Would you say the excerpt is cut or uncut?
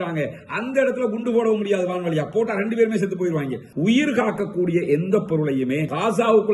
cut